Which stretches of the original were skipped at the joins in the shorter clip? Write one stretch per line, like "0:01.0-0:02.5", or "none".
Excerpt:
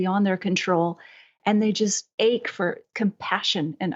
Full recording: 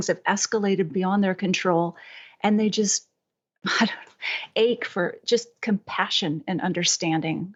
0:03.0-0:04.4
0:05.2-0:05.5